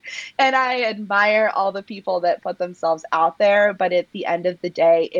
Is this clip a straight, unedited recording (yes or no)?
yes